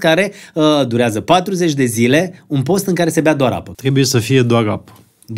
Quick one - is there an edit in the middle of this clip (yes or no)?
yes